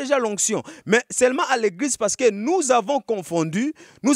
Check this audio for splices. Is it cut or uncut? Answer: uncut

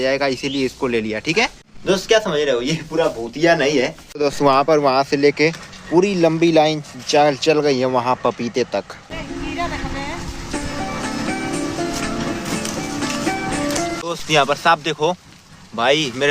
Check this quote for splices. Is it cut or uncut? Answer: cut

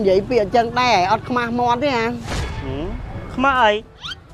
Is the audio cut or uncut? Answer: uncut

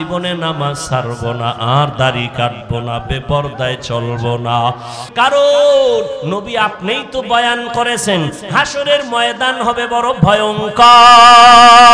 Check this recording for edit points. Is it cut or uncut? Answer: cut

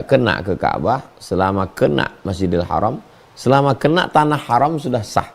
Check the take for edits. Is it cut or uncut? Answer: uncut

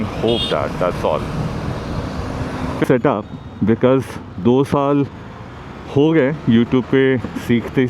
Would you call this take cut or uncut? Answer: cut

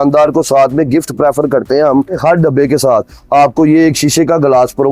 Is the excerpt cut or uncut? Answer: uncut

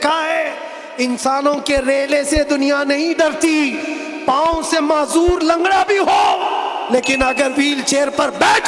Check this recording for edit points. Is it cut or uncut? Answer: uncut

